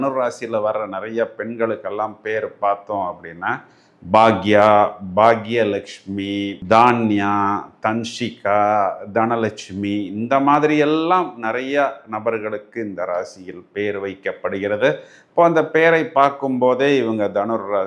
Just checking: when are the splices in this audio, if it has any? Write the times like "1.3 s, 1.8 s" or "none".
none